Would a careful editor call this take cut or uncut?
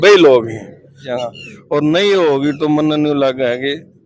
cut